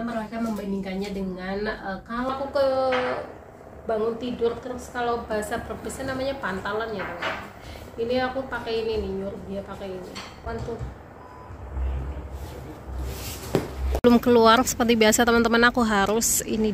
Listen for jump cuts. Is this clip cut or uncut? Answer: cut